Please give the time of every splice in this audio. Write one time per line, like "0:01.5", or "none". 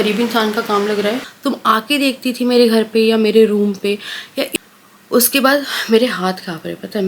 0:01.3
0:04.5